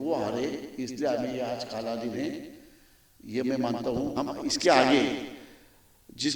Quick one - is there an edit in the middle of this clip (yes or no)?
yes